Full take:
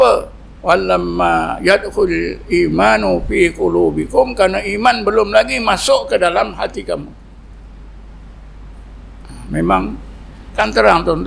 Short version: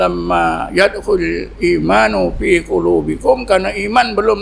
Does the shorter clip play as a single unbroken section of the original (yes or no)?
yes